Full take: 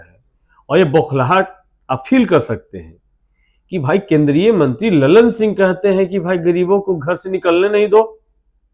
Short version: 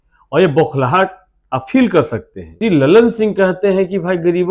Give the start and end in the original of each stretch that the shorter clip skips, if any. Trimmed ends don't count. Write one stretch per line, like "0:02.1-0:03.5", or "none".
0:02.9-0:04.8